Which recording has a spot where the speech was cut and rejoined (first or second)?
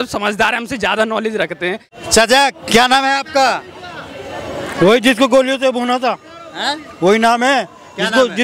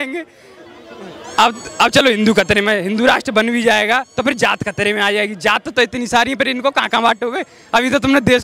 first